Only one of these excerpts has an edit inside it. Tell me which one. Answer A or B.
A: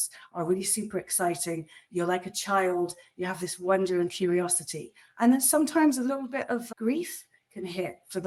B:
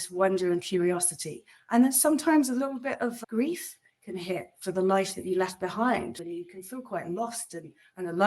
B